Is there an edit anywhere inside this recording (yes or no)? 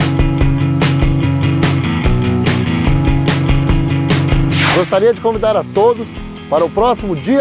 no